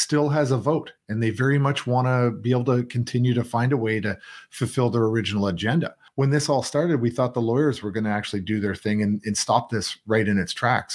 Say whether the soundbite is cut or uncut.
cut